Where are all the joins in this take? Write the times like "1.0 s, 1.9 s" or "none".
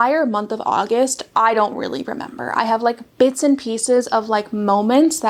none

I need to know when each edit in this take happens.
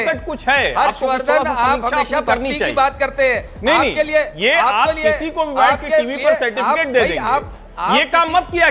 none

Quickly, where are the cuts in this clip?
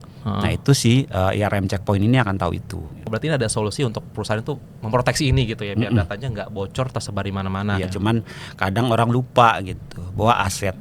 3.0 s, 7.8 s

